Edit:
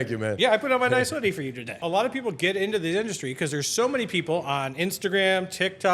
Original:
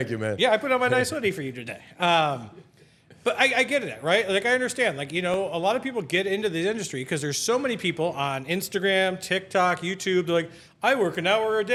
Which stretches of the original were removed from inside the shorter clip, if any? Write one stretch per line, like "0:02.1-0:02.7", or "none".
0:01.8-0:05.5